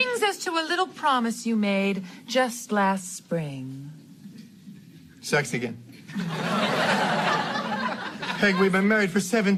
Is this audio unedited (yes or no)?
yes